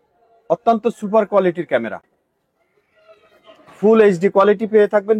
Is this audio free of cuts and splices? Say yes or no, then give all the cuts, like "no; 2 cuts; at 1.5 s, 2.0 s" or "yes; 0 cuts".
yes; 0 cuts